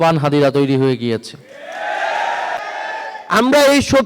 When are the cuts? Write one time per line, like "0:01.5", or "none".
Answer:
0:02.6

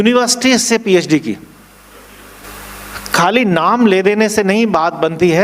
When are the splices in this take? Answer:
0:02.4

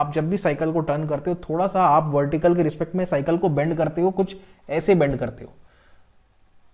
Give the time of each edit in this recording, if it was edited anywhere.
none

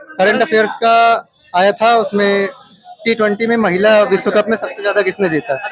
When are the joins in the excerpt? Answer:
none

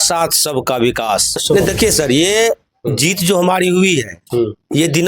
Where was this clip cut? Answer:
0:01.4

